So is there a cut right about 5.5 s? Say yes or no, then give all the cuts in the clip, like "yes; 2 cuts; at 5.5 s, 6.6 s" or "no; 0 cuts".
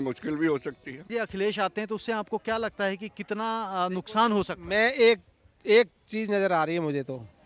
no; 1 cut; at 1.0 s